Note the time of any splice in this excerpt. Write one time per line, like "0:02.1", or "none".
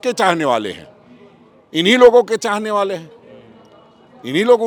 none